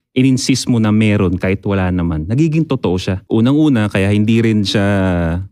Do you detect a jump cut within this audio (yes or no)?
yes